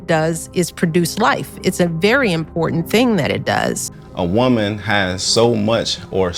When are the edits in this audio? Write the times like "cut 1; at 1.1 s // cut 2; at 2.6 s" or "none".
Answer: cut 1; at 3.8 s